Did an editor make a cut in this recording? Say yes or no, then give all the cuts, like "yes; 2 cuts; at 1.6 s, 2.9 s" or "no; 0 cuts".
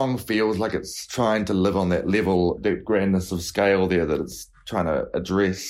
yes; 2 cuts; at 1.0 s, 2.7 s